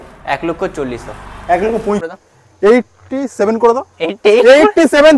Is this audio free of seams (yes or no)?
no